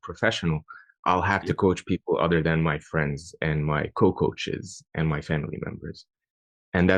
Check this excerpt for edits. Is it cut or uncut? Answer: uncut